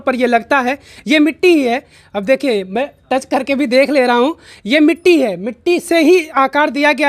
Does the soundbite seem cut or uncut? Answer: uncut